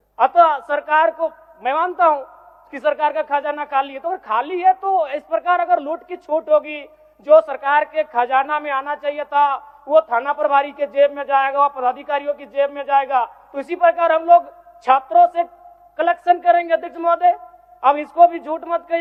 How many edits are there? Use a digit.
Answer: 0